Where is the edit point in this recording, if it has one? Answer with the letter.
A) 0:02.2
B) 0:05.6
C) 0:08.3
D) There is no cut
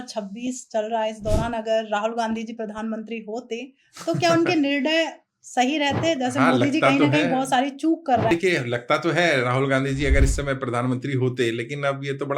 C